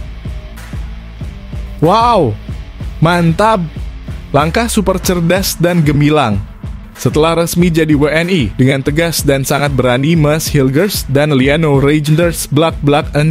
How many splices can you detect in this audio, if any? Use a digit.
1